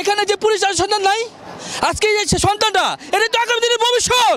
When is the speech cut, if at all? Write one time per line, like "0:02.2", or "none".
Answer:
none